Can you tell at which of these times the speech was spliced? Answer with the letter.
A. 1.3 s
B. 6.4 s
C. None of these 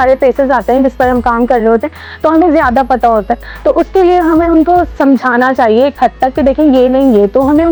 C